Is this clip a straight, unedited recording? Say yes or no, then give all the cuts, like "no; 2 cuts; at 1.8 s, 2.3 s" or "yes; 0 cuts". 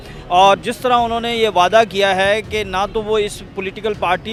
yes; 0 cuts